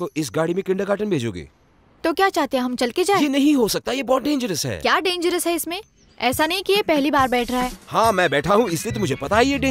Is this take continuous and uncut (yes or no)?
yes